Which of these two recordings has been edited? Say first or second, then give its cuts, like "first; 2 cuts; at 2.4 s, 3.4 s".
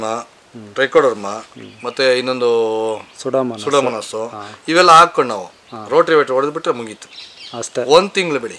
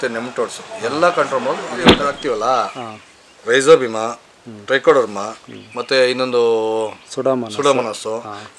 second; 1 cut; at 2.1 s